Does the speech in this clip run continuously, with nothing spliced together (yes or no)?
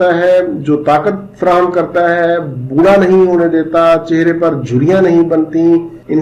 yes